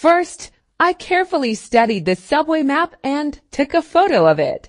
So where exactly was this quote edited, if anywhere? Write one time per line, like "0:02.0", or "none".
0:03.0